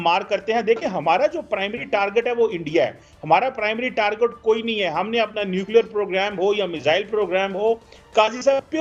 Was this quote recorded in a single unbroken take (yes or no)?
yes